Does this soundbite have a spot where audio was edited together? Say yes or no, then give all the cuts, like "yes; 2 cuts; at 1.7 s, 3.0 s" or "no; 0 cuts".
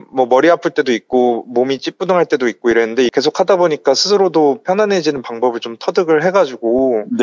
yes; 1 cut; at 3.1 s